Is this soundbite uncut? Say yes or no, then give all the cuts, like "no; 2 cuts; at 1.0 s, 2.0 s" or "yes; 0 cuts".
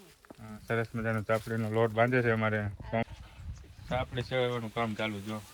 no; 1 cut; at 3.0 s